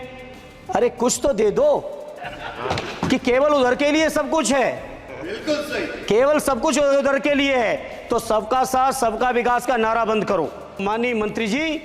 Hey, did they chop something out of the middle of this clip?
yes; 1 cut; at 10.8 s

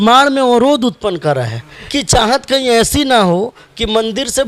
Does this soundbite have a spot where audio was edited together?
yes; 1 cut; at 1.9 s

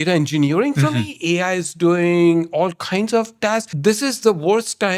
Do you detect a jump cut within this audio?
yes; 1 cut; at 3.7 s

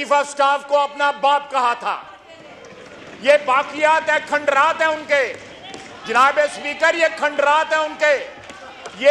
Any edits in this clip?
no; 0 cuts

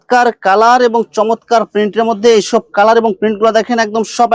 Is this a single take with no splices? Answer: yes; 0 cuts

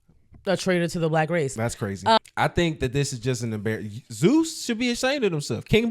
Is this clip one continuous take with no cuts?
no; 1 cut; at 2.2 s

